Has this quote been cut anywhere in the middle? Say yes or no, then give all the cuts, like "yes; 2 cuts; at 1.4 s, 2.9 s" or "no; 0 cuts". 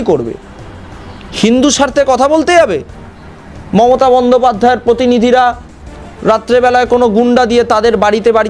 no; 0 cuts